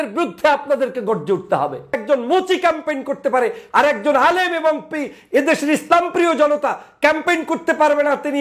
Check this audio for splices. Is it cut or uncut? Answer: cut